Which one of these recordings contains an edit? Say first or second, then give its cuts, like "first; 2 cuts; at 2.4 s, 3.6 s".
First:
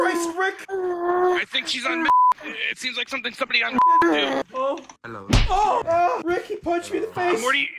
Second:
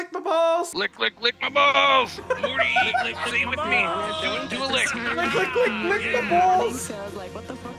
first; 2 cuts; at 4.4 s, 6.0 s